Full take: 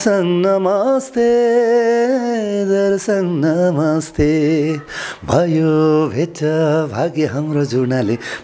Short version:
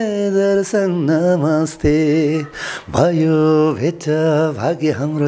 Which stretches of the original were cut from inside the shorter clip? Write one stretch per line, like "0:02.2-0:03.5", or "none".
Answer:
none